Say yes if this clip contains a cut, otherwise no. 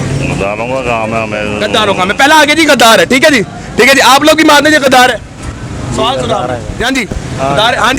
no